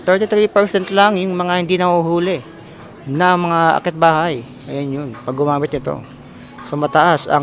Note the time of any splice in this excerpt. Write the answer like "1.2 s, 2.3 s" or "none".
none

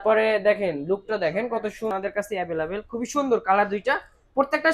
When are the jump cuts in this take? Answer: 1.8 s

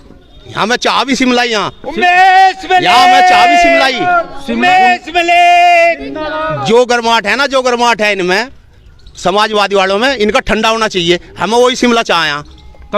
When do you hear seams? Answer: none

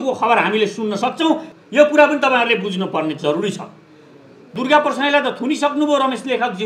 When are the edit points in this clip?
1.5 s, 4.6 s

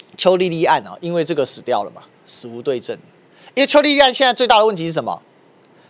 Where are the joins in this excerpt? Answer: none

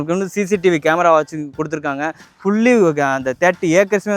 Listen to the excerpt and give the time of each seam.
2.2 s

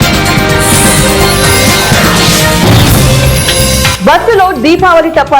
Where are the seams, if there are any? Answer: none

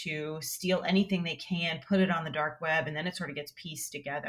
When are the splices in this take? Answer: none

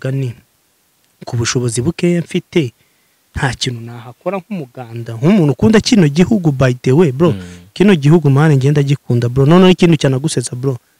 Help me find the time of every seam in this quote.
none

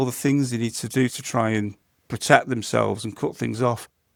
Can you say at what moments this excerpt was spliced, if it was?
none

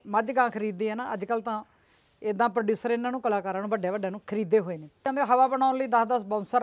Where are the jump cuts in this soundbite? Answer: 5.0 s

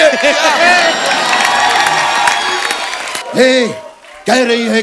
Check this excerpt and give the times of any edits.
3.1 s

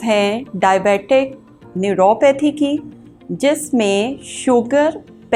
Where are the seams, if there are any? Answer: none

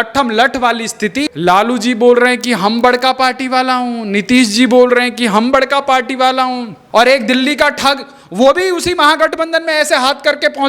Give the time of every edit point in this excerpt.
1.3 s, 6.7 s

